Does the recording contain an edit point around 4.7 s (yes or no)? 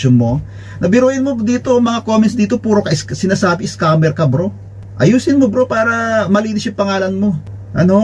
no